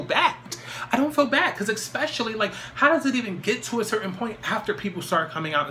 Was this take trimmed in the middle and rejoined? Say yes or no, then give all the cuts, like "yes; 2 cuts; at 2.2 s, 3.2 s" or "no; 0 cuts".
no; 0 cuts